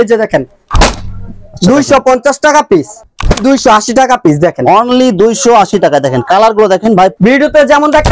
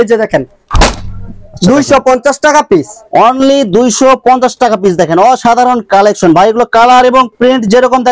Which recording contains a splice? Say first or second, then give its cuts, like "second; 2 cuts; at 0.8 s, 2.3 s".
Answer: first; 2 cuts; at 3.0 s, 7.1 s